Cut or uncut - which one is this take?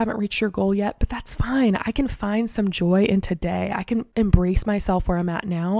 cut